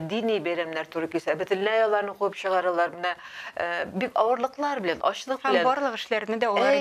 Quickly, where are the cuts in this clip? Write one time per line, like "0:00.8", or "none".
none